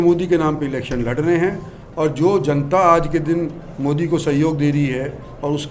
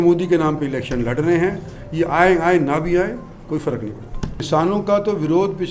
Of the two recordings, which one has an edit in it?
second; 2 cuts; at 1.8 s, 4.5 s

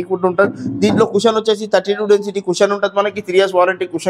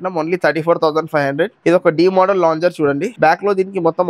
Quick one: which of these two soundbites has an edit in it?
second; 1 cut; at 1.6 s

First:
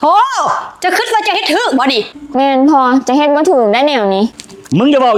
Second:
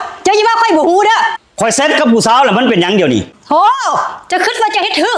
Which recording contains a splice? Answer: second; 1 cut; at 1.4 s

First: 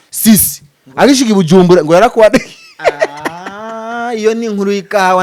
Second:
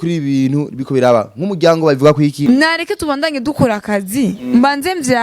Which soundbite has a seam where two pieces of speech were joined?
second; 1 cut; at 2.5 s

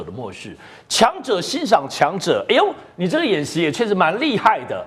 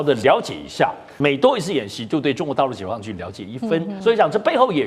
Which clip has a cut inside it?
second; 2 cuts; at 1.1 s, 4.0 s

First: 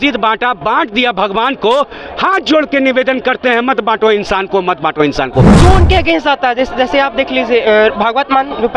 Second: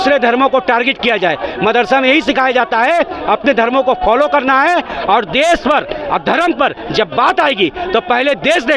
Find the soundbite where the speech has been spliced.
first; 1 cut; at 5.5 s

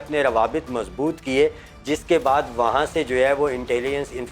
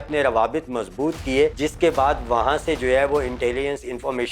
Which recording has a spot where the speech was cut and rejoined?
second; 1 cut; at 1.6 s

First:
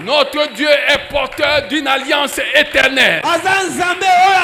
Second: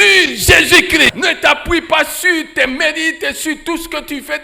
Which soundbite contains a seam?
second; 1 cut; at 1.1 s

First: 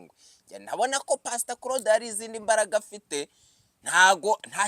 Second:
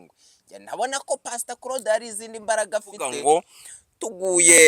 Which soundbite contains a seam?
second; 1 cut; at 3.0 s

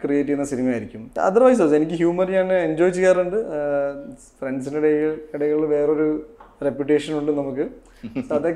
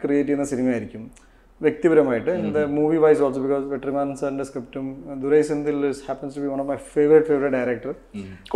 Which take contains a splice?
first; 1 cut; at 1.1 s

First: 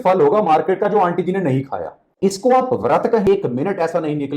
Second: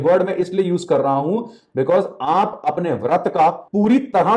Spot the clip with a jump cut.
first; 1 cut; at 3.3 s

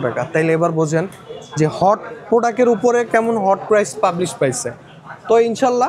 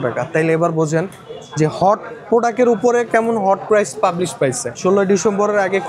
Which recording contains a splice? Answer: second; 1 cut; at 4.8 s

